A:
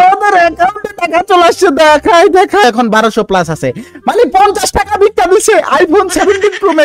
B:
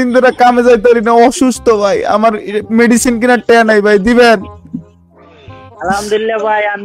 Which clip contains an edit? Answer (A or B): A